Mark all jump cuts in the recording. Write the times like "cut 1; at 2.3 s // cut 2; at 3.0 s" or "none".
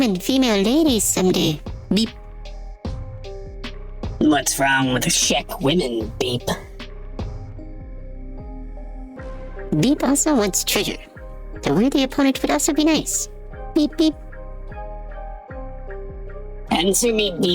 none